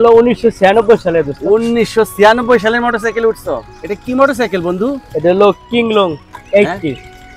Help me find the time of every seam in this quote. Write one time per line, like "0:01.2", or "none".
none